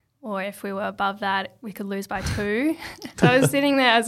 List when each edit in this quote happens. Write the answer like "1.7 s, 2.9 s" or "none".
3.0 s